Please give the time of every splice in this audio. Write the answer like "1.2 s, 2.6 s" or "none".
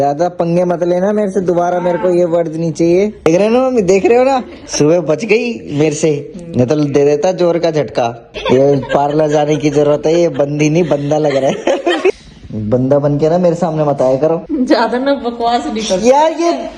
3.2 s, 4.6 s, 8.3 s, 12.1 s, 14.5 s